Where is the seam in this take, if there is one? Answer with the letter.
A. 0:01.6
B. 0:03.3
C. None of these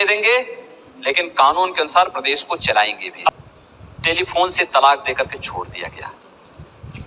B